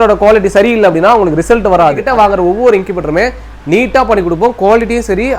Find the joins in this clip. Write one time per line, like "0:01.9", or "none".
0:02.0